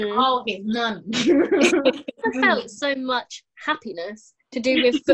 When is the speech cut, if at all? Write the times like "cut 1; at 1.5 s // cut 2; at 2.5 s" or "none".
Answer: cut 1; at 2.2 s